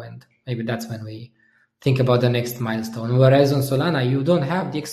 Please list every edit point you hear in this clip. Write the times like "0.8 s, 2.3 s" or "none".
none

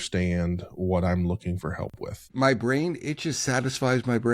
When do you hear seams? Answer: 2.3 s

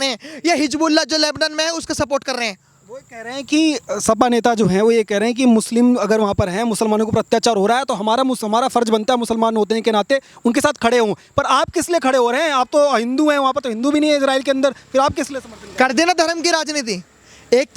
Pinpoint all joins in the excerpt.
none

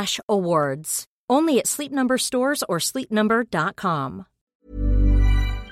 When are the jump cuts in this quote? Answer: 4.7 s

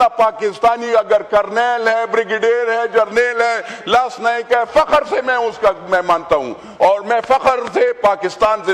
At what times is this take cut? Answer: none

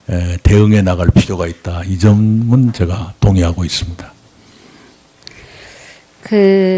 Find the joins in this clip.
4.4 s

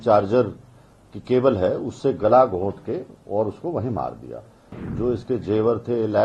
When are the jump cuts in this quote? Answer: 4.8 s

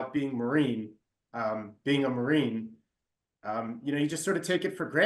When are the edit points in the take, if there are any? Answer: none

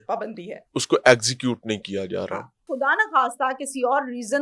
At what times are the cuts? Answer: 2.7 s

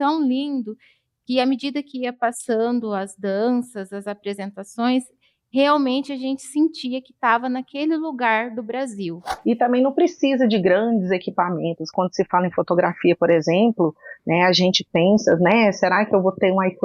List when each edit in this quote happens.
9.3 s

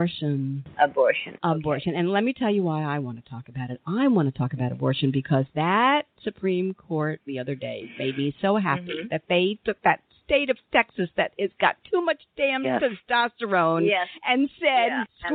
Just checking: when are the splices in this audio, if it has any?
none

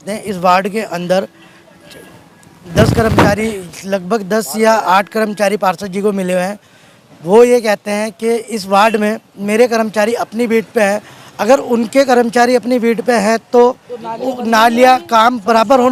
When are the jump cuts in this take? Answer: none

